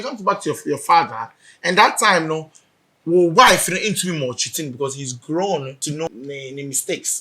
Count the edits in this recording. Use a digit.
1